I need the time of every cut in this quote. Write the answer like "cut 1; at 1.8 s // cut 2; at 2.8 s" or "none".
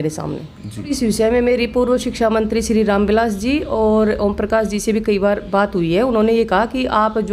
cut 1; at 0.9 s